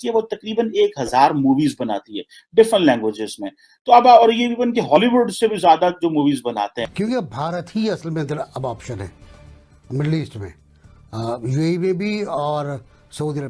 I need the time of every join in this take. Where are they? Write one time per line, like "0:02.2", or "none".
0:06.8